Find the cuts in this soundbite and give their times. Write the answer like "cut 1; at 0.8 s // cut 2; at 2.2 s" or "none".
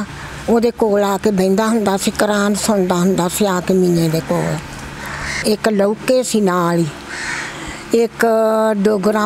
cut 1; at 5.4 s